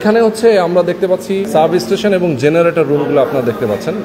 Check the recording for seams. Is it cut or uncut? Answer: cut